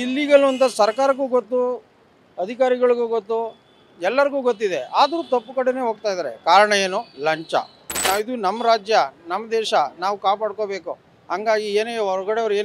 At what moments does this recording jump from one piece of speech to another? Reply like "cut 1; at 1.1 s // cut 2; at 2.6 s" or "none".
cut 1; at 8.0 s